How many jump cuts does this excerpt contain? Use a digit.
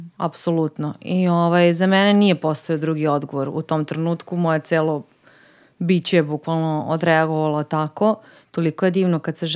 1